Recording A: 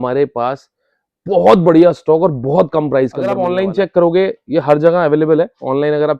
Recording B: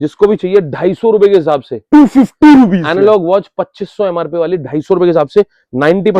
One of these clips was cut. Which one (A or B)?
A